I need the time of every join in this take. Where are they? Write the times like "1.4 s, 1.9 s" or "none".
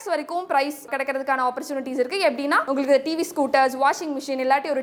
none